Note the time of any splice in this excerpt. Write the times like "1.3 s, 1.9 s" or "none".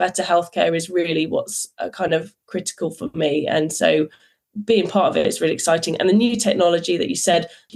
none